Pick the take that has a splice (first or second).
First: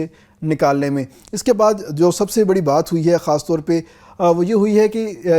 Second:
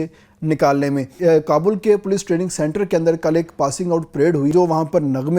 second